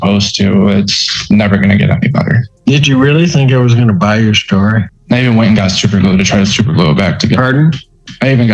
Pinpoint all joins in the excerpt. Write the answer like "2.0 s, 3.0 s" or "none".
2.5 s, 4.9 s